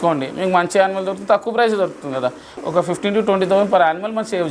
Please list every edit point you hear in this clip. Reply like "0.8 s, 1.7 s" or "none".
2.6 s

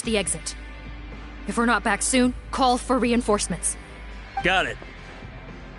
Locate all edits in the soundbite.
none

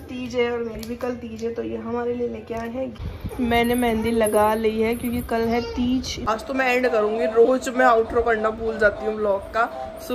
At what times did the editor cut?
3.0 s, 6.2 s

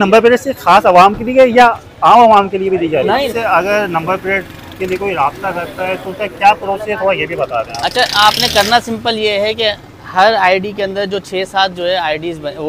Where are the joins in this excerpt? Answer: 3.3 s

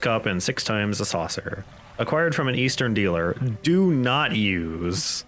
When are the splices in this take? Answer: none

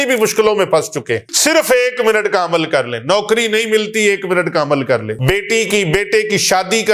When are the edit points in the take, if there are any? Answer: 1.3 s, 5.1 s

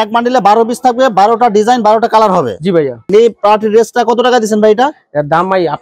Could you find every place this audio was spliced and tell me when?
3.1 s

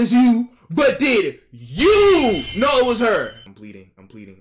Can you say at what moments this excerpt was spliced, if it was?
none

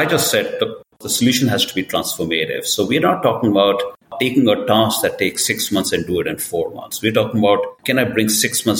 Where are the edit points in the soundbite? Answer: 1.1 s, 7.8 s

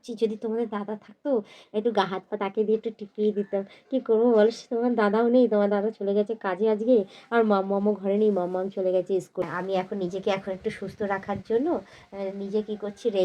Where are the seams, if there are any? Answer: 9.4 s

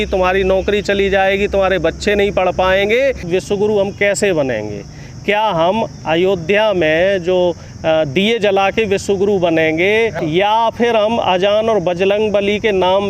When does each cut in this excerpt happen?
3.3 s, 10.2 s

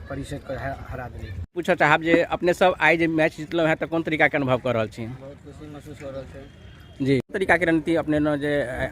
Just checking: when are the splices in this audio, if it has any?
1.6 s, 7.3 s

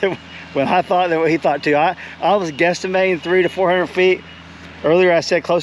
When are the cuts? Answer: none

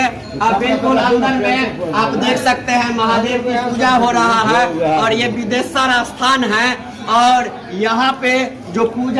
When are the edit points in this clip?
none

